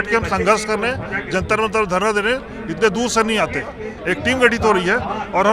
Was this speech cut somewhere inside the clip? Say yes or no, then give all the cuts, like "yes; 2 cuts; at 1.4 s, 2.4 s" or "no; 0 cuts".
yes; 1 cut; at 3.9 s